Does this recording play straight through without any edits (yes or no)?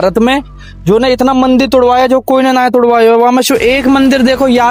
yes